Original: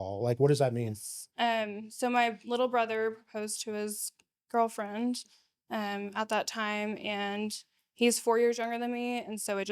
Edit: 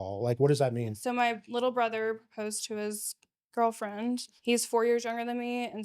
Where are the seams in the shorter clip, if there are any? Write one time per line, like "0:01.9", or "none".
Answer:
0:00.9
0:04.3